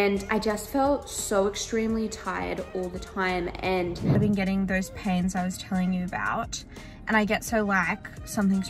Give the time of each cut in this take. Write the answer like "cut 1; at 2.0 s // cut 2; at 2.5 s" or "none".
cut 1; at 4.2 s